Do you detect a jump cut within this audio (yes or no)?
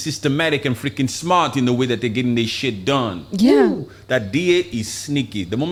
no